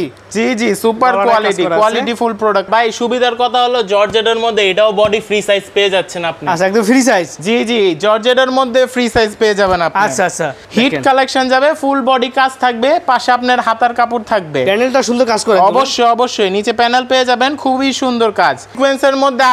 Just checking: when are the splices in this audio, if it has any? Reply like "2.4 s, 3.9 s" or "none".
2.7 s, 10.5 s, 18.7 s